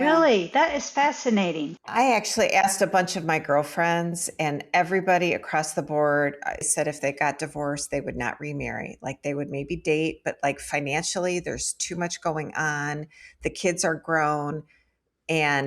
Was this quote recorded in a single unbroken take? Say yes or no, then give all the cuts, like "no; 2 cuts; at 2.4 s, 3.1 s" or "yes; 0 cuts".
no; 2 cuts; at 1.9 s, 6.7 s